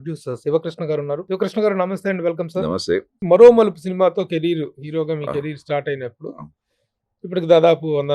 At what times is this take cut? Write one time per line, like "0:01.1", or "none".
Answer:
0:01.2
0:03.1